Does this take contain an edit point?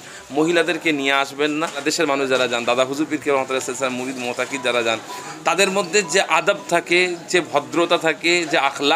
yes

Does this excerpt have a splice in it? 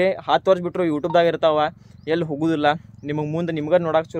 no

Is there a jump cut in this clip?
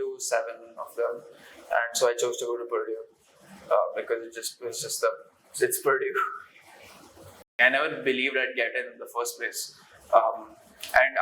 yes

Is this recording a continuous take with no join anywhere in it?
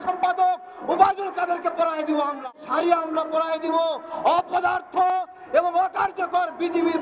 no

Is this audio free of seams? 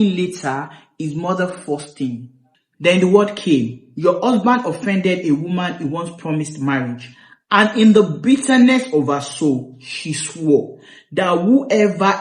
no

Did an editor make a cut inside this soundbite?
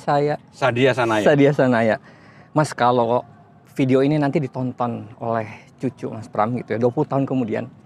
no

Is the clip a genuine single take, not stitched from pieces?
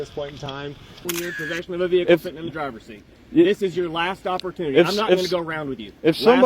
no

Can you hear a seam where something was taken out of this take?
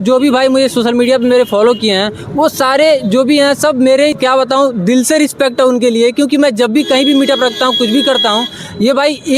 yes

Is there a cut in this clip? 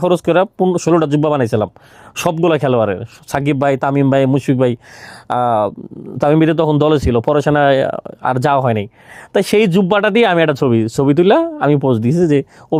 no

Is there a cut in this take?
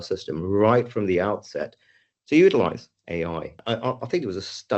yes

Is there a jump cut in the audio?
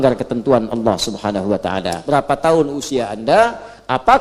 yes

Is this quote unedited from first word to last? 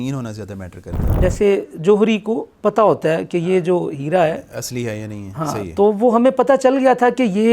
no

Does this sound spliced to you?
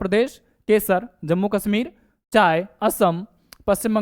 no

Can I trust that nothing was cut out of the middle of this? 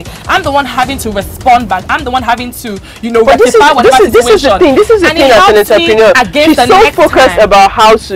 yes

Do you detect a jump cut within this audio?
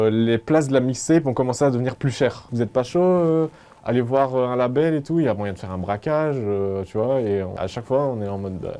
yes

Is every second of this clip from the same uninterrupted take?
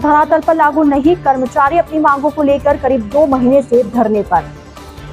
yes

